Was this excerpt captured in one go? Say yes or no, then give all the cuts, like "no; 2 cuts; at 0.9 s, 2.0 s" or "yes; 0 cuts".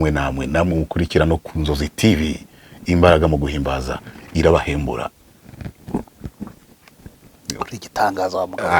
yes; 0 cuts